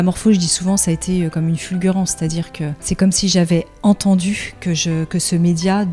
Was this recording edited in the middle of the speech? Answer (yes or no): yes